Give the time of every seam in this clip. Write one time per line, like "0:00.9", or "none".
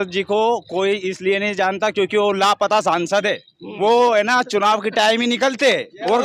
none